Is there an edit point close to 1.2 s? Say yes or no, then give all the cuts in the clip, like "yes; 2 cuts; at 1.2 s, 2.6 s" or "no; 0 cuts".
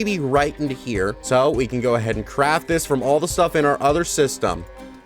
yes; 1 cut; at 1.2 s